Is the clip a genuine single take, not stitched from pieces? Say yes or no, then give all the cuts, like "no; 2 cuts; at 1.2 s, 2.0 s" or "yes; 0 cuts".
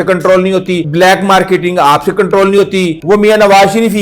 no; 2 cuts; at 0.9 s, 3.0 s